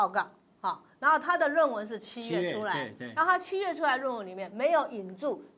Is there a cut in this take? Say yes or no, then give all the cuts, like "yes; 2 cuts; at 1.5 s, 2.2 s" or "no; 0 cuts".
no; 0 cuts